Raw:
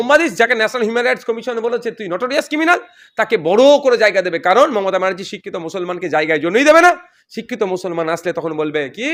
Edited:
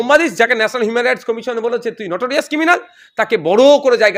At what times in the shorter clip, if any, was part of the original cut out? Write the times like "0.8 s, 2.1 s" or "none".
none